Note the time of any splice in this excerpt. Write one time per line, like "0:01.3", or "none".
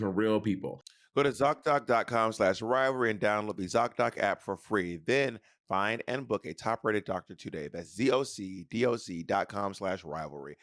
none